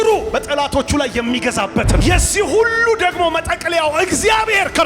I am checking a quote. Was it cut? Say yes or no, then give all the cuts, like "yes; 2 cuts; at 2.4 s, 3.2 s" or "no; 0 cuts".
yes; 1 cut; at 2.0 s